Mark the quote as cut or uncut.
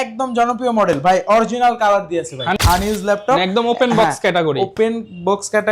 cut